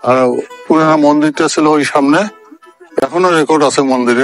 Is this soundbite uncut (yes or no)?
yes